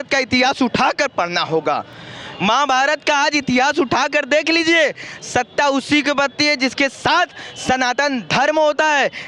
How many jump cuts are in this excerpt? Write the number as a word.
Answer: zero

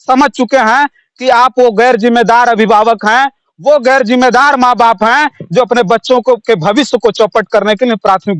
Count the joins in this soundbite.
zero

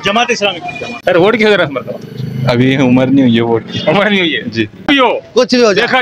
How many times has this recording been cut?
two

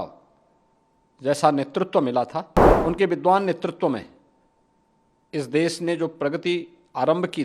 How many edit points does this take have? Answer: one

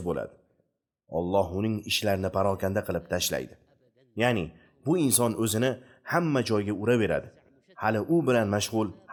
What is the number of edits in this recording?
zero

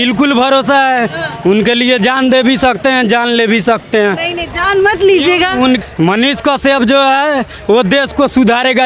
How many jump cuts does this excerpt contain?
zero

